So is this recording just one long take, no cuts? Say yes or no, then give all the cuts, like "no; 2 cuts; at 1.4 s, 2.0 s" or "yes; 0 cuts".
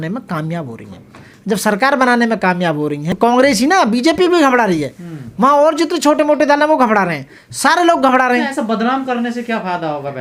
yes; 0 cuts